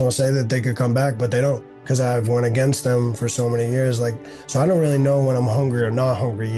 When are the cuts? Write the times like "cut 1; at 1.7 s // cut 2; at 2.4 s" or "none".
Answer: cut 1; at 2.2 s